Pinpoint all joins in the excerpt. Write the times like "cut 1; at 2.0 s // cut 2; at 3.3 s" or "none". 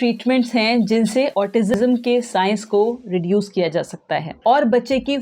cut 1; at 4.3 s